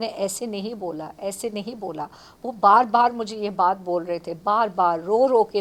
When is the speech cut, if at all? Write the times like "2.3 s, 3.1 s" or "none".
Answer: none